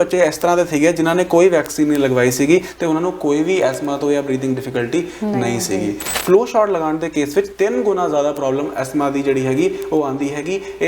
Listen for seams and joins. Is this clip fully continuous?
no; 1 cut; at 6.1 s

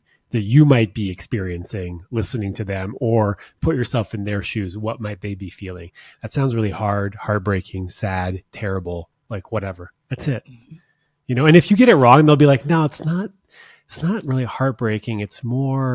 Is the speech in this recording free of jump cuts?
yes; 0 cuts

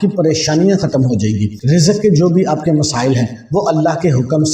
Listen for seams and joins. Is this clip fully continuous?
no; 1 cut; at 1.5 s

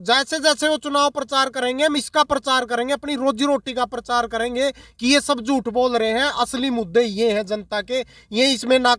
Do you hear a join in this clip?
no; 0 cuts

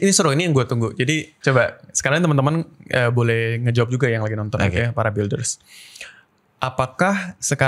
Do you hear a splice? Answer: yes; 1 cut; at 1.3 s

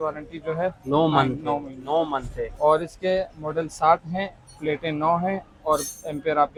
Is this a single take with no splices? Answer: yes; 0 cuts

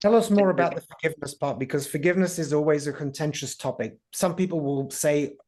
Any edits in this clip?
no; 0 cuts

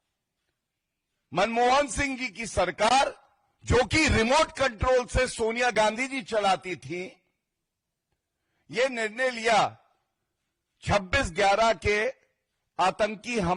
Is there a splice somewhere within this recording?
no; 0 cuts

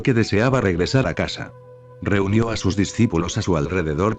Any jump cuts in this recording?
yes; 1 cut; at 1.2 s

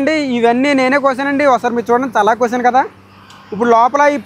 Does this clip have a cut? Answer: no; 0 cuts

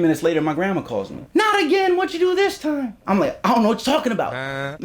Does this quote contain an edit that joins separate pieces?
yes; 2 cuts; at 1.2 s, 3.0 s

